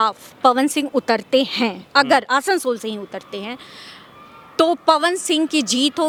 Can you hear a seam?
no; 0 cuts

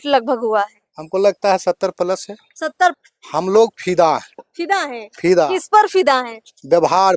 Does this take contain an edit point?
yes; 1 cut; at 3.0 s

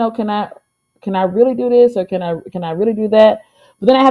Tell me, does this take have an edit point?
no; 0 cuts

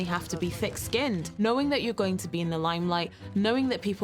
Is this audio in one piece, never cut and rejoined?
no; 1 cut; at 1.3 s

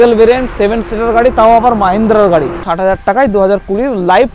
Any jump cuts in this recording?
yes; 1 cut; at 2.6 s

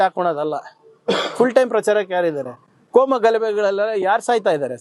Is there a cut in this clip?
no; 0 cuts

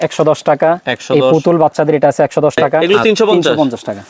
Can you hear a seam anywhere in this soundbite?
yes; 1 cut; at 2.8 s

